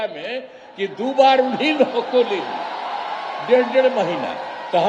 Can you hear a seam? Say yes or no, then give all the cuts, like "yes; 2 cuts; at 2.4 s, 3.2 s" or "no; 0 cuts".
no; 0 cuts